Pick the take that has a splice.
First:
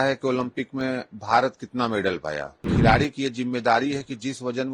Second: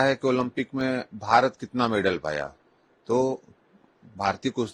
first; 1 cut; at 2.7 s

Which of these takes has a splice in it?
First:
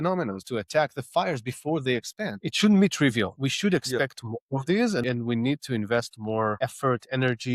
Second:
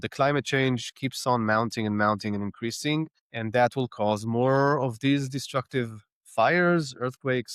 first; 4 cuts; at 2.4 s, 3.3 s, 5.0 s, 6.6 s

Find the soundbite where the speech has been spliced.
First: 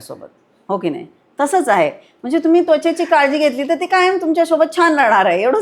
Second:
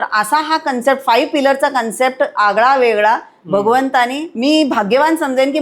second; 1 cut; at 4.2 s

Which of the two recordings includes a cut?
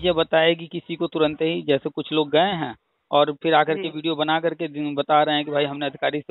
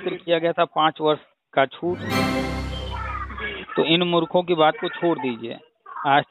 second; 1 cut; at 2.4 s

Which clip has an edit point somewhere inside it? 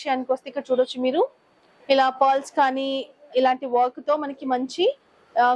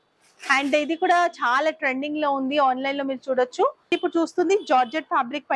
second; 1 cut; at 3.9 s

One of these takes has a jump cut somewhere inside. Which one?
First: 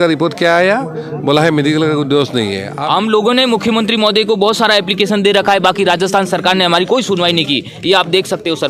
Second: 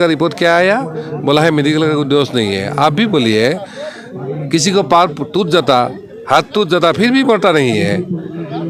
first; 1 cut; at 2.7 s

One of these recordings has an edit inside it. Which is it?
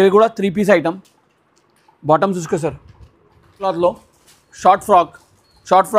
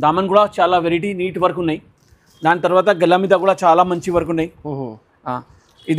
first; 1 cut; at 3.6 s

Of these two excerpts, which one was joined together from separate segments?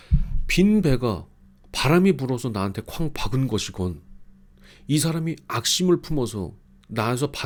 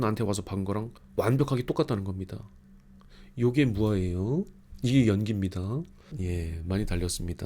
second; 2 cuts; at 4.6 s, 6.2 s

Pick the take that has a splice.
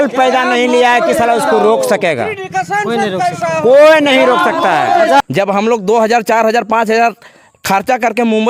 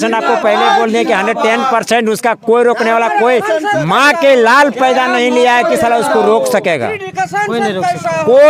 first; 1 cut; at 5.2 s

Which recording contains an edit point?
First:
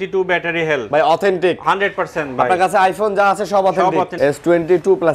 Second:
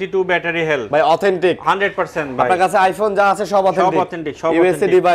first; 1 cut; at 4.1 s

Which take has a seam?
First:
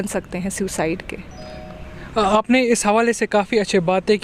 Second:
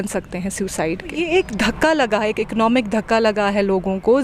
second; 1 cut; at 1.2 s

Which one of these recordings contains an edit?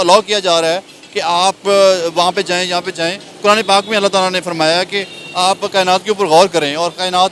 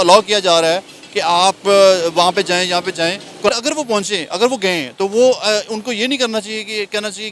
second; 1 cut; at 3.5 s

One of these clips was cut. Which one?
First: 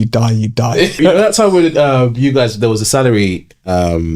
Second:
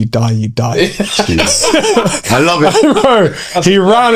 first; 1 cut; at 1.0 s

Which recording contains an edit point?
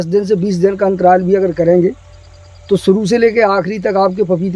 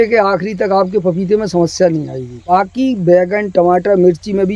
second; 1 cut; at 2.5 s

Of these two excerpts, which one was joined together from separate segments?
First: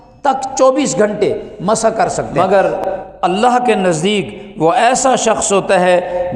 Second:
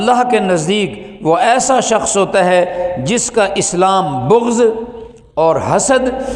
first; 1 cut; at 2.2 s

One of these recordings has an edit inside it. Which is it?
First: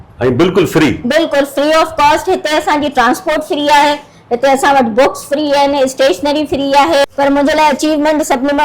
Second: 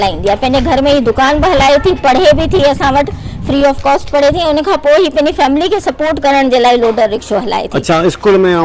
first; 1 cut; at 7.1 s

